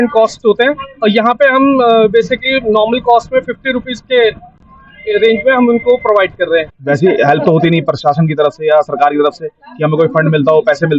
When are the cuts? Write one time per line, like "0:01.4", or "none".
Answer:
0:06.7

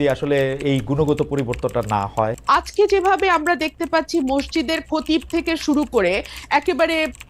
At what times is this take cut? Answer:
0:02.4

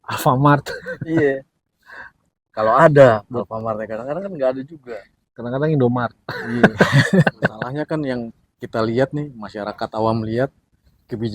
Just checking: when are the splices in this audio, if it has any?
0:07.7

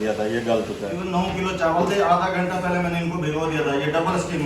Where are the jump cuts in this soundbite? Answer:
0:00.9

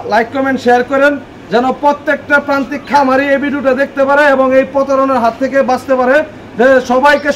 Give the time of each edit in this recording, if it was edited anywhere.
none

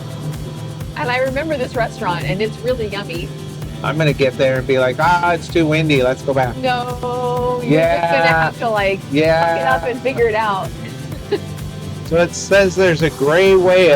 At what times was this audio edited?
0:11.7

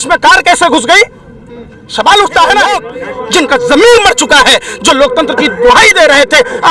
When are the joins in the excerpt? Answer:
0:03.0

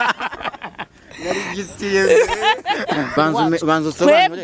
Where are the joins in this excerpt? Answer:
0:03.1

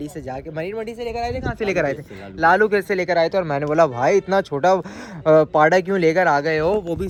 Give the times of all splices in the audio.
none

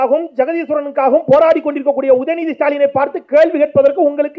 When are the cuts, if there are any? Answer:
none

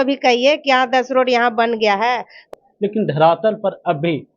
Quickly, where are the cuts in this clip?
0:02.4

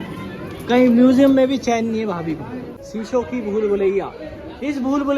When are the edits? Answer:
0:02.8

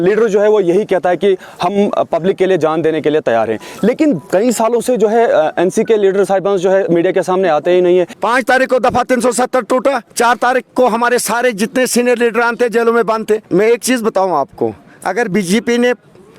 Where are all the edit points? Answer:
0:08.1
0:13.4

